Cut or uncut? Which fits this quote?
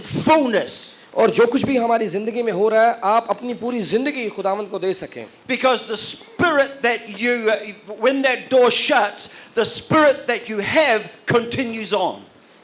uncut